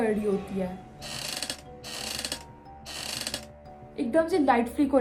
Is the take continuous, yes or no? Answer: yes